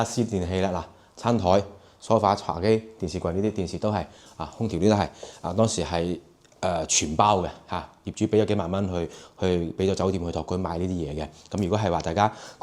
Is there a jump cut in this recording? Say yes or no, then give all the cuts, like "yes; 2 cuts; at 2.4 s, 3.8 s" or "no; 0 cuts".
no; 0 cuts